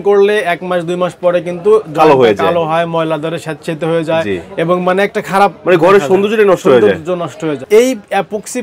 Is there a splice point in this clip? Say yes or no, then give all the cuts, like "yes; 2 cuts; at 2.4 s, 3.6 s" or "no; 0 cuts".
yes; 1 cut; at 7.7 s